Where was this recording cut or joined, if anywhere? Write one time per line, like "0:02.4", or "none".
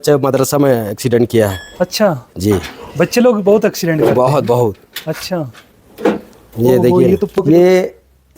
0:07.4